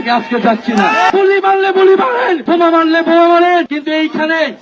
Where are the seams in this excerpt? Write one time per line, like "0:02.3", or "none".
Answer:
0:01.3
0:02.4
0:03.7